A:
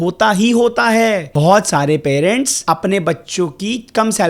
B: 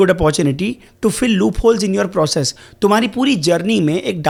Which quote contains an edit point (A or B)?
A